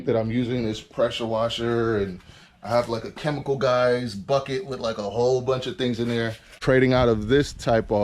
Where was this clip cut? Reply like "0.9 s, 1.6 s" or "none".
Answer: 6.6 s

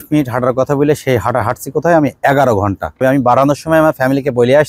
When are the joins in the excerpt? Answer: 3.0 s

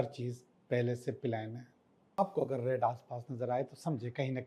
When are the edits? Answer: 2.2 s

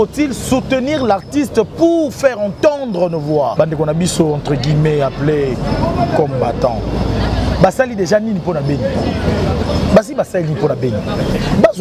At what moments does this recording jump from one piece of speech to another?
3.5 s

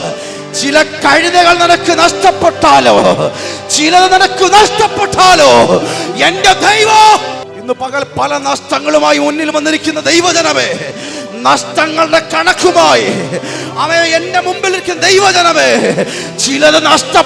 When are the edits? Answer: 7.5 s

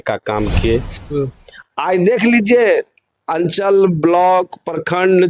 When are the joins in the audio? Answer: 1.0 s

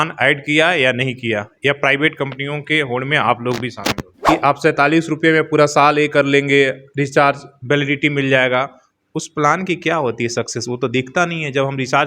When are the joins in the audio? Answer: 4.1 s

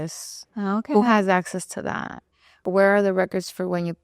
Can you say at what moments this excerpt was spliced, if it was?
2.6 s

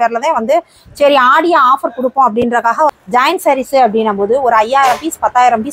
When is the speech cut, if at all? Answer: 2.9 s

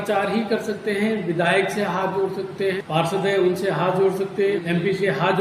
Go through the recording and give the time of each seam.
2.8 s, 4.6 s

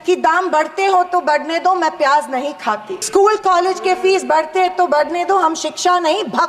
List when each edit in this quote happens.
2.9 s

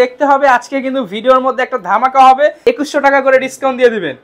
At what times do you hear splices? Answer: 2.6 s

